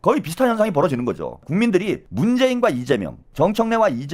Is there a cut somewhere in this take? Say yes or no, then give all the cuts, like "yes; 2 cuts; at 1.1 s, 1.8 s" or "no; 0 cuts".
yes; 2 cuts; at 1.8 s, 3.2 s